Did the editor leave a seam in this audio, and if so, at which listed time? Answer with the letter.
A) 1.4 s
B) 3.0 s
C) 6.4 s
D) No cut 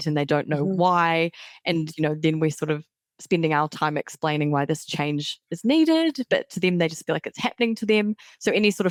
D